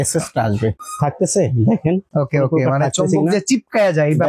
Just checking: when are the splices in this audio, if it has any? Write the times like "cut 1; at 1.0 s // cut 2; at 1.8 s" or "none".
cut 1; at 0.8 s // cut 2; at 2.1 s